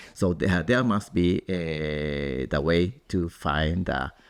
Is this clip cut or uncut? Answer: uncut